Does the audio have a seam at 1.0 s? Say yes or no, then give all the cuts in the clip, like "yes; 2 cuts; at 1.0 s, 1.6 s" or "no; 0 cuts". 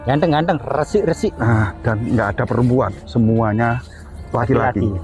no; 0 cuts